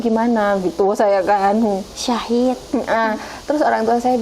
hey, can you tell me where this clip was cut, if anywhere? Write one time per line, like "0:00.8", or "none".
none